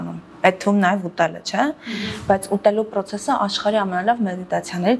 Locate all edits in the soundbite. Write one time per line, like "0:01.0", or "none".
none